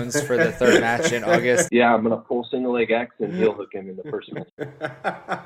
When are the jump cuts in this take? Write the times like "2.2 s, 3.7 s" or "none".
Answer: 1.7 s, 4.5 s